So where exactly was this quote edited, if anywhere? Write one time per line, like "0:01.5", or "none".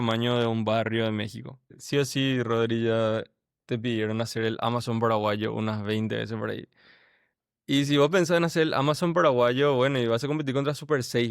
0:01.8